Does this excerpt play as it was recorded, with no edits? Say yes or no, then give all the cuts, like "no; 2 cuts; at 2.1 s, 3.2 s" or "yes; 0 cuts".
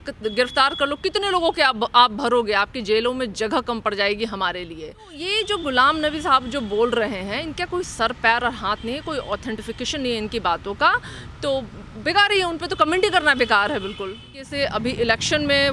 no; 2 cuts; at 5.2 s, 14.4 s